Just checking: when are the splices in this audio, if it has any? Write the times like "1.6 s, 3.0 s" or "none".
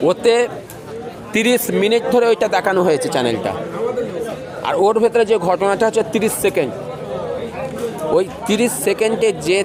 none